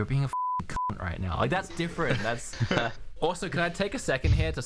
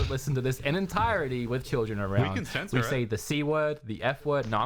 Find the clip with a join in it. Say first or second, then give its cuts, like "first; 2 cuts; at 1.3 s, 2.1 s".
first; 1 cut; at 2.5 s